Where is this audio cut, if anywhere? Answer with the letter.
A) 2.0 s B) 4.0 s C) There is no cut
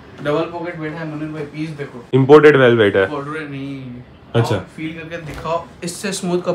A